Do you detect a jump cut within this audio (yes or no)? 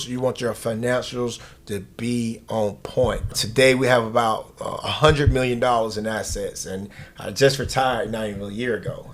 yes